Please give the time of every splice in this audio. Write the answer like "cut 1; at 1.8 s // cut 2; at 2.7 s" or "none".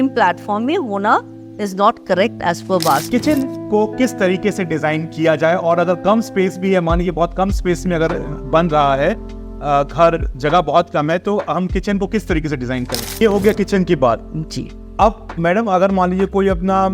cut 1; at 3.0 s // cut 2; at 13.2 s